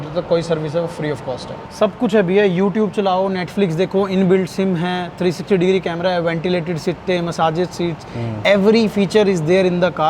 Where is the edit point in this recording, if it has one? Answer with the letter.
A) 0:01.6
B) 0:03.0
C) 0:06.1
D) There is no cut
A